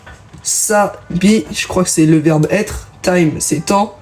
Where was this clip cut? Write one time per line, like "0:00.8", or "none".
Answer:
0:01.4